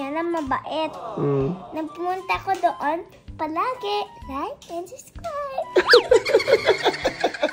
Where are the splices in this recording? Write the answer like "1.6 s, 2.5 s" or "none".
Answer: none